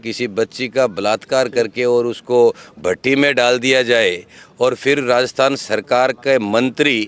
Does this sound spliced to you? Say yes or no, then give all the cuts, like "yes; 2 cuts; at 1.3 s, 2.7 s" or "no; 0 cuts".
no; 0 cuts